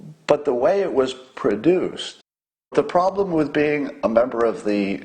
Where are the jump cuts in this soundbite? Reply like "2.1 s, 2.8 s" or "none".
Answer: 2.7 s